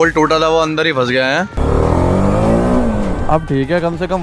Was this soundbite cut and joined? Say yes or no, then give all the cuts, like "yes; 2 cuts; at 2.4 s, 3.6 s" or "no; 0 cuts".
yes; 1 cut; at 1.6 s